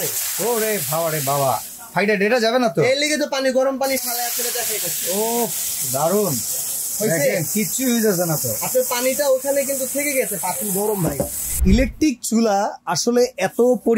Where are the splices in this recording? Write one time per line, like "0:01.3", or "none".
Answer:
0:11.5